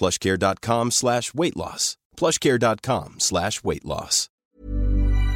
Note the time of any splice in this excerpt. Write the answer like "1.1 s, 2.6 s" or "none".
4.4 s